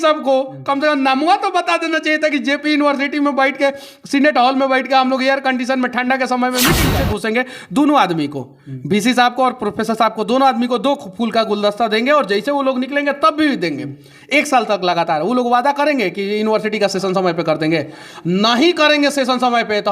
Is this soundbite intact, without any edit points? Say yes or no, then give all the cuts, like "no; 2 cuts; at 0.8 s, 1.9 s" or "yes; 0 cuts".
no; 1 cut; at 7.0 s